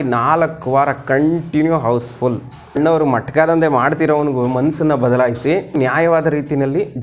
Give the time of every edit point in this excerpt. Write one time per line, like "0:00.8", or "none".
0:02.7
0:05.8